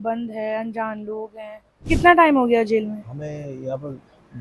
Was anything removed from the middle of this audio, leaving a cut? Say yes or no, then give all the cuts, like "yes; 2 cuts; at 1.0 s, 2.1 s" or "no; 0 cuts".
yes; 1 cut; at 1.9 s